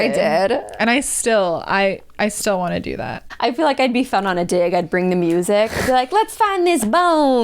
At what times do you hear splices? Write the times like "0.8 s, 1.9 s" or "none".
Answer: 3.2 s